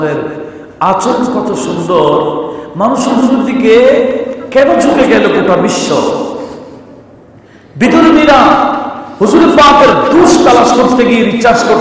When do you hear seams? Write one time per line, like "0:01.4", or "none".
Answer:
none